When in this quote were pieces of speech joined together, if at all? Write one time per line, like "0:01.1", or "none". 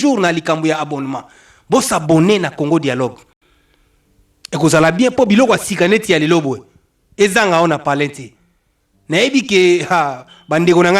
none